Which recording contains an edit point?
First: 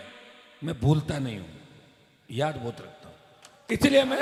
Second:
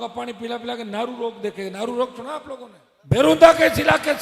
second; 1 cut; at 2.7 s

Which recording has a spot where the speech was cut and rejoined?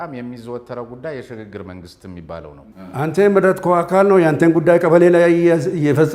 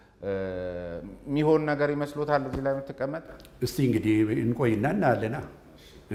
first; 1 cut; at 2.7 s

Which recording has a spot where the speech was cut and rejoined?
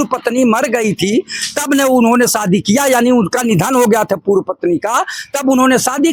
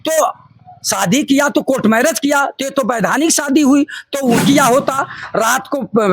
second; 1 cut; at 4.4 s

